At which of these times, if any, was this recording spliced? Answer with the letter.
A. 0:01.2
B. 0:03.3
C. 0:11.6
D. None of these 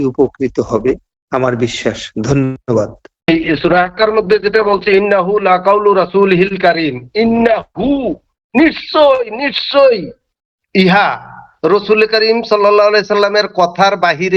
B